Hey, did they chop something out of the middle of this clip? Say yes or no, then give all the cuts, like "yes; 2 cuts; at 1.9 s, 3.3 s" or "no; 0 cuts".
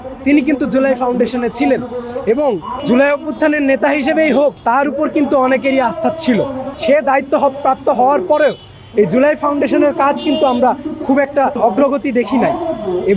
yes; 1 cut; at 6.7 s